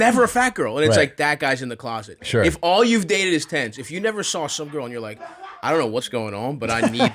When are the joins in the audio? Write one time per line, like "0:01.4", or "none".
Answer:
0:06.1